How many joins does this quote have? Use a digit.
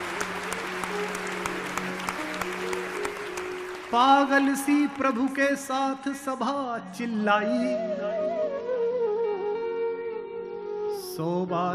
0